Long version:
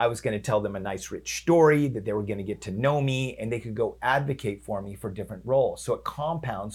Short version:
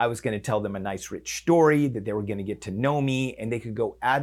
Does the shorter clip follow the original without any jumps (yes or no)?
yes